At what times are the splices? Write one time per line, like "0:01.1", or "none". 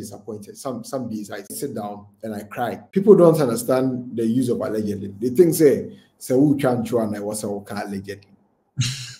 0:01.5
0:02.8